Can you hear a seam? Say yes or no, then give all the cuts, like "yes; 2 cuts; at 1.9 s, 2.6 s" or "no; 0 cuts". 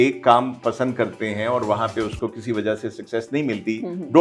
no; 0 cuts